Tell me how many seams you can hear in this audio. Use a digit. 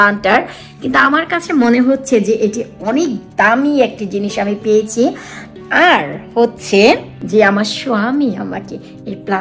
1